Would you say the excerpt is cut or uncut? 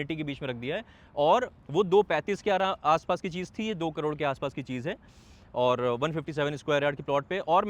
uncut